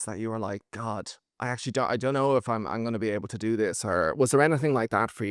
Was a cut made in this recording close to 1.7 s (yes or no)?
no